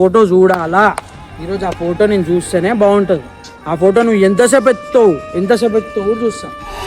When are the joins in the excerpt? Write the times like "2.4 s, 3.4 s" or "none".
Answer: none